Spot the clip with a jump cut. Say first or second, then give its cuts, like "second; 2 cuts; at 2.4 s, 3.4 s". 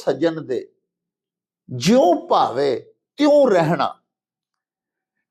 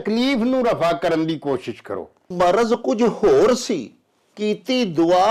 second; 1 cut; at 2.3 s